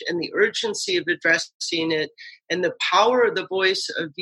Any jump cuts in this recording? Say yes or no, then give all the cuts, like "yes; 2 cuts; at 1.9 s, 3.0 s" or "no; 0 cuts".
no; 0 cuts